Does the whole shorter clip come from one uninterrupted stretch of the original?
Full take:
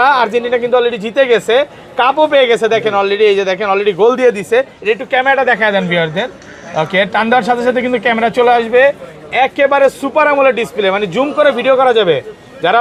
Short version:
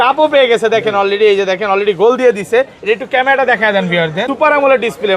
no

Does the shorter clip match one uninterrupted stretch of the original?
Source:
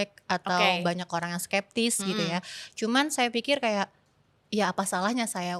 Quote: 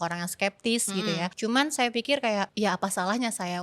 no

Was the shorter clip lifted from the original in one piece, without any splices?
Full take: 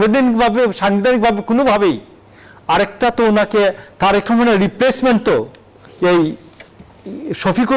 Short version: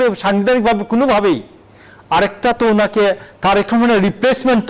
yes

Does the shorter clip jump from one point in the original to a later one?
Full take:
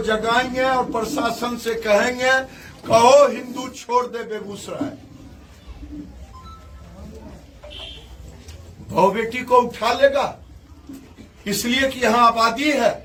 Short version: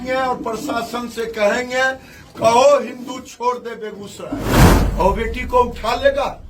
yes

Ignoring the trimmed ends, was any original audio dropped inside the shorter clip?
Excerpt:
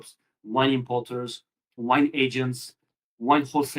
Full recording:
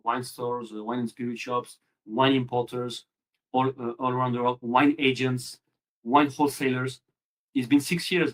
yes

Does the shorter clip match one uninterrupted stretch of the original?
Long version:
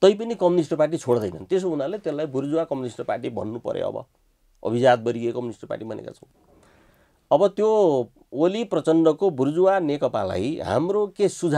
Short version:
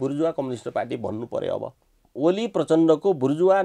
no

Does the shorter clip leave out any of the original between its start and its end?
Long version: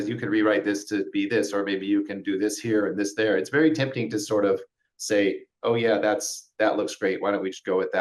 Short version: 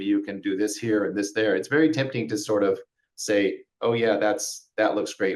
no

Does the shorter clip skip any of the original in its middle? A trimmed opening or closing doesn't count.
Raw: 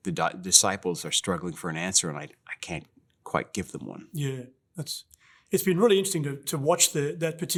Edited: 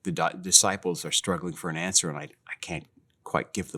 no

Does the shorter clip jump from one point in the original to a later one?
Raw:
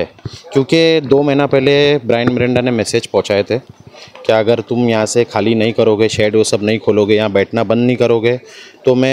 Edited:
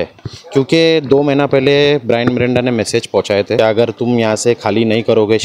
yes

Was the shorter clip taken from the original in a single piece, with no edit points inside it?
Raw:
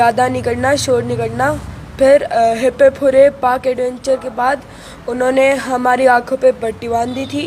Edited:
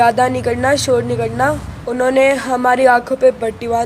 no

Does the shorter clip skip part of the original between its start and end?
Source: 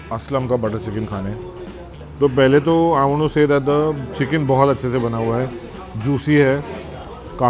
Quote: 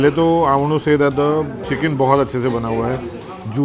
no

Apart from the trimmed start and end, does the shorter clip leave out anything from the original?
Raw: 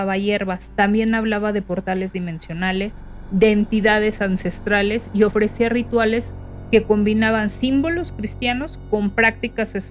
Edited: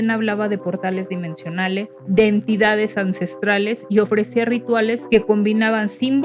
yes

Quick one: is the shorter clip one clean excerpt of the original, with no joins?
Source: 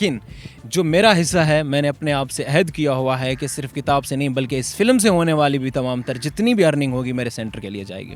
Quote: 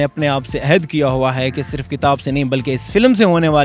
yes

